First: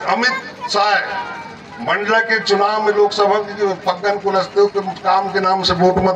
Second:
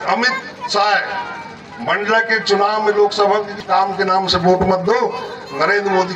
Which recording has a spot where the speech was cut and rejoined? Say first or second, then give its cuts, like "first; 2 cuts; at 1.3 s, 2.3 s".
second; 1 cut; at 3.5 s